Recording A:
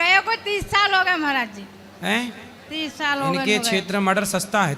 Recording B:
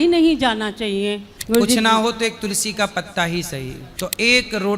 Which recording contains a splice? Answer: B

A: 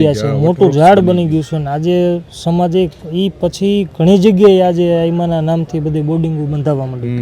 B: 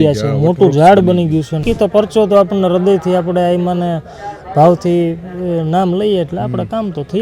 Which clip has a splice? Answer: B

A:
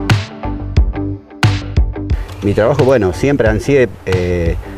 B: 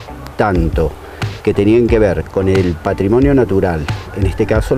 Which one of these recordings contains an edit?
A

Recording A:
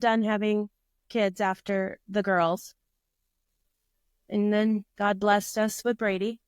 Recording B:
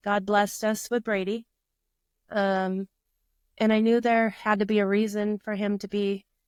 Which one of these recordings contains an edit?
A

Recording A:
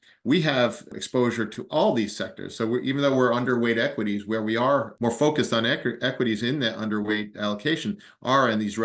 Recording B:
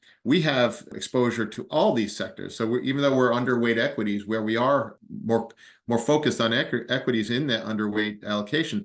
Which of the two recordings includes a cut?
A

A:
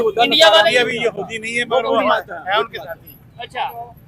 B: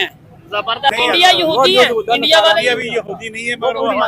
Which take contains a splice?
B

